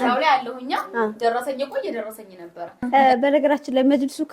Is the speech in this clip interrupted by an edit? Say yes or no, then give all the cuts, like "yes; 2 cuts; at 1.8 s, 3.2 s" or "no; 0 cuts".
yes; 1 cut; at 2.7 s